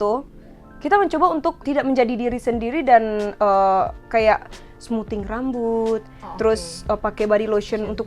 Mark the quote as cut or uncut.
cut